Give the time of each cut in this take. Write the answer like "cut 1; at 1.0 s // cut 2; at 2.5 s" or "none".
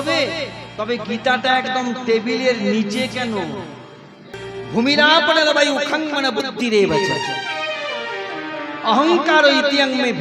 cut 1; at 4.4 s

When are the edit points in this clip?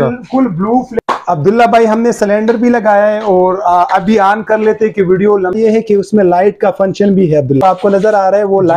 cut 1; at 1.0 s // cut 2; at 5.5 s // cut 3; at 7.6 s

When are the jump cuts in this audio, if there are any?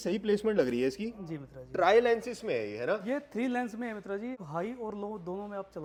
none

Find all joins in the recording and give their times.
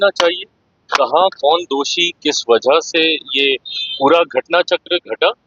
none

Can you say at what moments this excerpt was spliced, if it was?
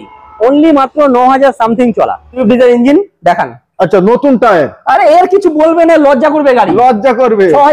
cut 1; at 2.3 s

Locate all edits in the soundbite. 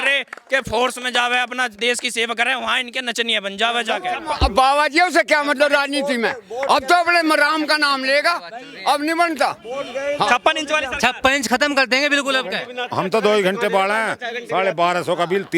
cut 1; at 4.1 s // cut 2; at 12.7 s

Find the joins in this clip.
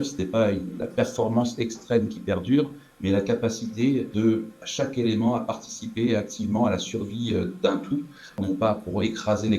cut 1; at 4.3 s // cut 2; at 8.4 s

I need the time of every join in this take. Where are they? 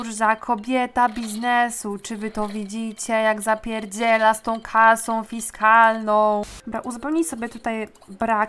cut 1; at 6.5 s

